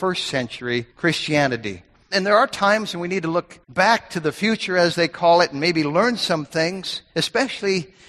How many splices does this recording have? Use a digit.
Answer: 3